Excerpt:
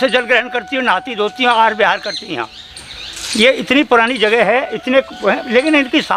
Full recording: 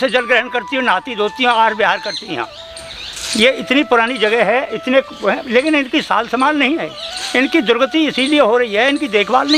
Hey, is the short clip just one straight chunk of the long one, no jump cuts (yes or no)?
yes